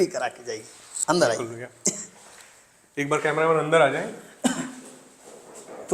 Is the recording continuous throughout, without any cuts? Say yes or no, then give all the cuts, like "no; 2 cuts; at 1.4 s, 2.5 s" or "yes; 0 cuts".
yes; 0 cuts